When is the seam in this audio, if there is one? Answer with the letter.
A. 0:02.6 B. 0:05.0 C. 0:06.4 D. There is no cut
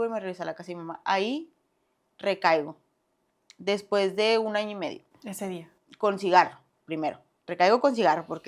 D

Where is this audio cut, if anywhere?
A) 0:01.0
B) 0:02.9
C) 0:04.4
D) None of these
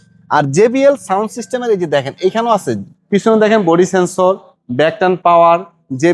B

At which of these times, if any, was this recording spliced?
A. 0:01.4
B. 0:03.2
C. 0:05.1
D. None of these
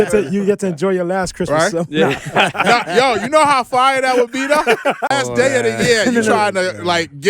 C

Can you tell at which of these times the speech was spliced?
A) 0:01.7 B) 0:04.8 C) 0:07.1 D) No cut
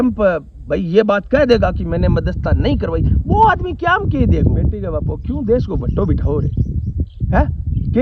B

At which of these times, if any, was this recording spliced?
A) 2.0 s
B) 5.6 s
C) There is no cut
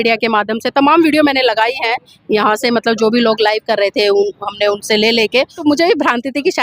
B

